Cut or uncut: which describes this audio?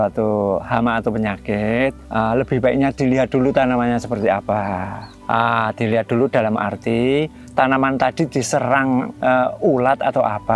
uncut